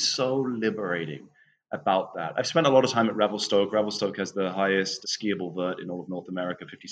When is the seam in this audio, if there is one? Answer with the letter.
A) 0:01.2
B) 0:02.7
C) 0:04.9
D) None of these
C